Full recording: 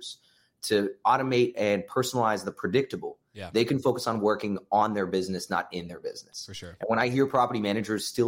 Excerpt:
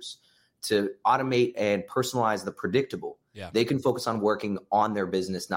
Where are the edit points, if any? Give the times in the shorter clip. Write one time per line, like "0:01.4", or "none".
none

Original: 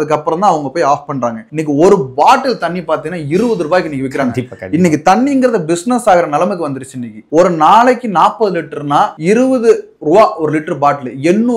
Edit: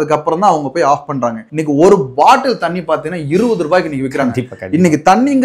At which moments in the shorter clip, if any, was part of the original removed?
none

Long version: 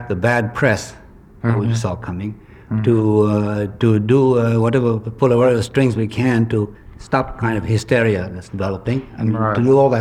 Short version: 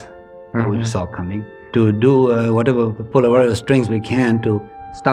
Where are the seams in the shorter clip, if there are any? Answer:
0:01.6

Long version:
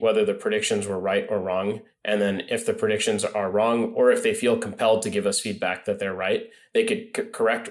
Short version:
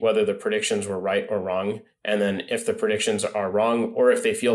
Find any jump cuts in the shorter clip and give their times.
none

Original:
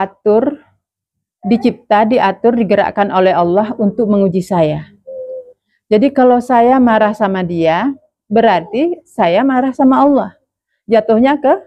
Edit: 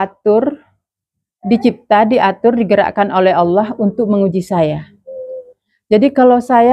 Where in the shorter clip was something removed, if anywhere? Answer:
none

